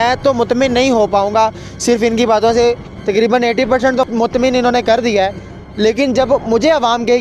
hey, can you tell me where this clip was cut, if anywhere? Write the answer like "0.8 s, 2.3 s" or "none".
4.1 s

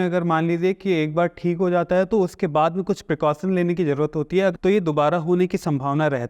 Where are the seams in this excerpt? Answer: 4.6 s

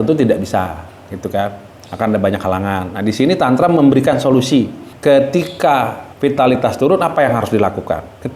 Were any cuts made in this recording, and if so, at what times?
4.8 s, 6.0 s

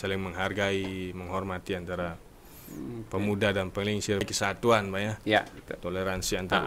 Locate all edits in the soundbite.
4.2 s

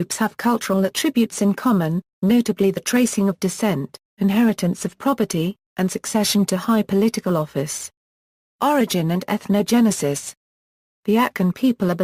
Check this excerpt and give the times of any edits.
none

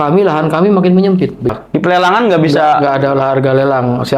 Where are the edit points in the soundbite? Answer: 1.5 s

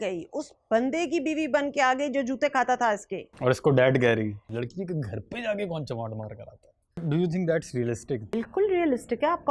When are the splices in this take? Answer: 4.4 s, 7.0 s, 8.3 s

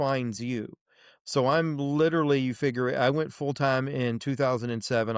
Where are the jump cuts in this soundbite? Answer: none

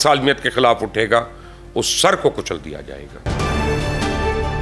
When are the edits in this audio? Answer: 3.2 s

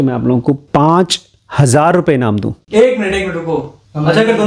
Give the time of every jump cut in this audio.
none

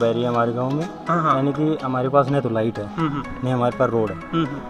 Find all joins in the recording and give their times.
none

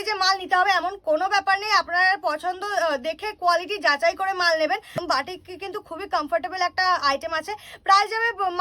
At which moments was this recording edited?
5.0 s

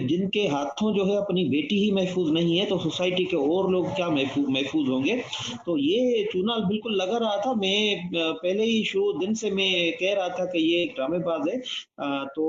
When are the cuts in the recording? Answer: none

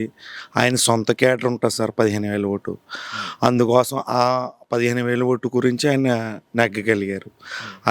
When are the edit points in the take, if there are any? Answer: none

